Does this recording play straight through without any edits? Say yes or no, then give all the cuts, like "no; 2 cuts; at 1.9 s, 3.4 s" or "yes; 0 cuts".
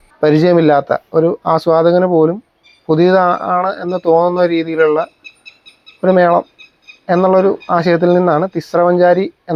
yes; 0 cuts